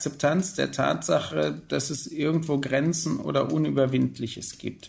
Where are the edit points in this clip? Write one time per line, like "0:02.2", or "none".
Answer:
none